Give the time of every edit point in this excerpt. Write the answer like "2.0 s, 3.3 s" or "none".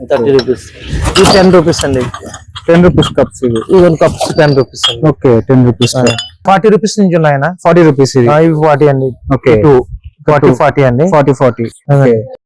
6.4 s